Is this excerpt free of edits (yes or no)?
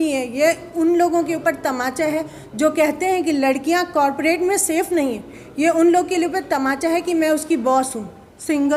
yes